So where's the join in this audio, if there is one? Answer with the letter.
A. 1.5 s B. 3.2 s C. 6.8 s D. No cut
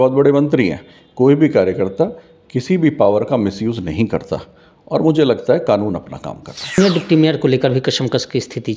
C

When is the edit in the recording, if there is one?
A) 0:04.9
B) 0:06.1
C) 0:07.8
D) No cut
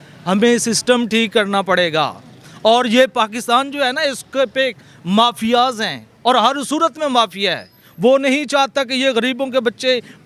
D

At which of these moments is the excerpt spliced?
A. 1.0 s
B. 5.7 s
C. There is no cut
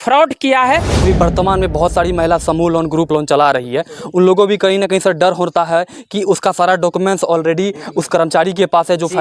A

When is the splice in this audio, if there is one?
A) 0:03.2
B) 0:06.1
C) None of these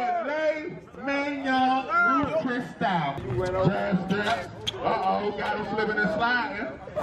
A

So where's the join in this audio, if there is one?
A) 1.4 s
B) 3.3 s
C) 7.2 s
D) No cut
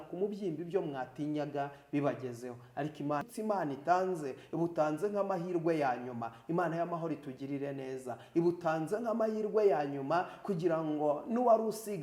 B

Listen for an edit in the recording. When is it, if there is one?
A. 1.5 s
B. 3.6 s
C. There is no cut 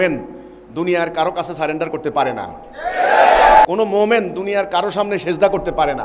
B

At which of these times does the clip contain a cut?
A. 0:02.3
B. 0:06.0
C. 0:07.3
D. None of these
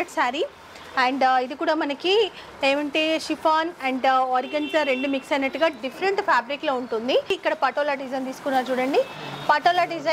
C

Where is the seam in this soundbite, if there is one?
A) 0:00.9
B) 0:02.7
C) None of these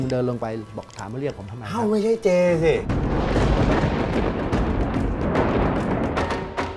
C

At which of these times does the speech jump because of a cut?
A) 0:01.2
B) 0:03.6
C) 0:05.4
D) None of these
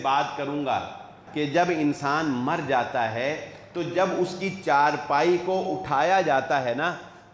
A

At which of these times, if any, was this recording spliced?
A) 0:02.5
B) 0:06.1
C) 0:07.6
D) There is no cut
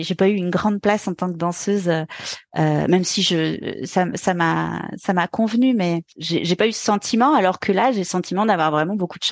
B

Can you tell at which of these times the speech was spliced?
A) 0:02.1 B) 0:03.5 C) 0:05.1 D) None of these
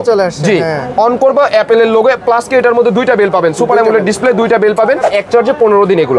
C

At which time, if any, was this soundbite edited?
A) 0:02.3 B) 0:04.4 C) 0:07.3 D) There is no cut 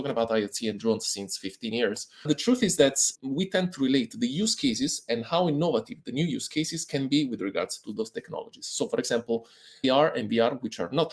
A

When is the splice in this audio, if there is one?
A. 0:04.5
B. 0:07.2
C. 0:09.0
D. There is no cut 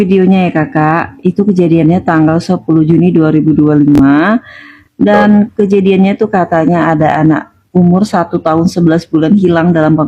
D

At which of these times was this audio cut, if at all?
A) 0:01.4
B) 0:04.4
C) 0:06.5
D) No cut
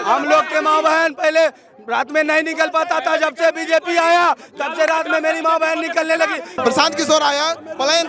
C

